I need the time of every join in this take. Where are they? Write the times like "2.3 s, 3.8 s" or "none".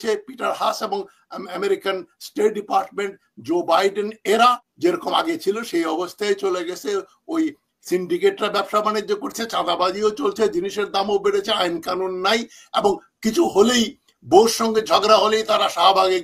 4.7 s